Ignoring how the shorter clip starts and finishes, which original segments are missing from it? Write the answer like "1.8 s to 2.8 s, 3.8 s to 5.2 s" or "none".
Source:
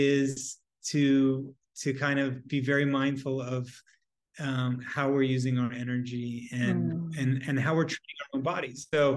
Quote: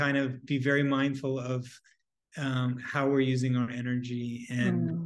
none